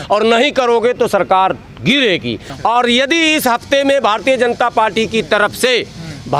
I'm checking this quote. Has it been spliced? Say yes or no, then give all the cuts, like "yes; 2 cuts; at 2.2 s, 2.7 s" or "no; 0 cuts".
yes; 1 cut; at 2.5 s